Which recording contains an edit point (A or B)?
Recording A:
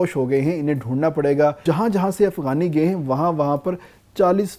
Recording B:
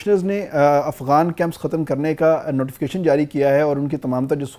A